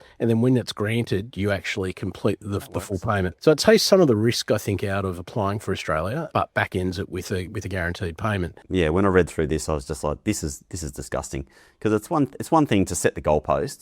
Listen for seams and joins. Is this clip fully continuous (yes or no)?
no